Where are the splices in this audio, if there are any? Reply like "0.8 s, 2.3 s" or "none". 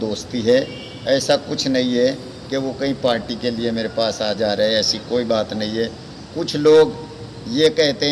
none